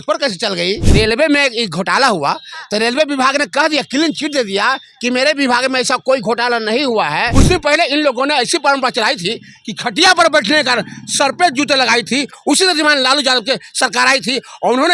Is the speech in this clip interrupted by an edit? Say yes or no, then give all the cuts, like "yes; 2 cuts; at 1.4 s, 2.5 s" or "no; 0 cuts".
yes; 2 cuts; at 0.9 s, 7.3 s